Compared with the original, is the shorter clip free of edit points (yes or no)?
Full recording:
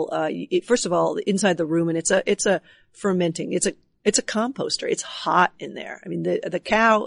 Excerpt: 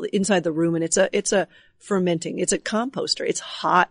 no